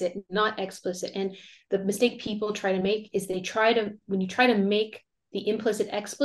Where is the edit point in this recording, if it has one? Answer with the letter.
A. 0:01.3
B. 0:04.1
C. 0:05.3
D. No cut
D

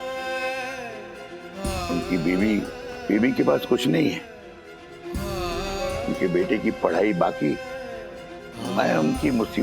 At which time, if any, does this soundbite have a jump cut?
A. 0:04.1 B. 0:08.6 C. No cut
B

